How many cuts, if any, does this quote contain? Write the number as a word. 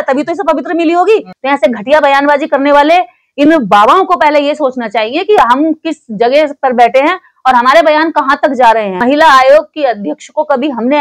one